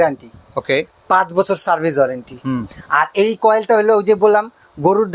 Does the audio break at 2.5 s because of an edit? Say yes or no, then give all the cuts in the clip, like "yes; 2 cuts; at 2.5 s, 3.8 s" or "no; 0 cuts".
no; 0 cuts